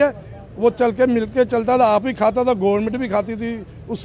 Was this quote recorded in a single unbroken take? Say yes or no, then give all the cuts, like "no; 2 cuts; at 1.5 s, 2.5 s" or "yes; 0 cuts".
yes; 0 cuts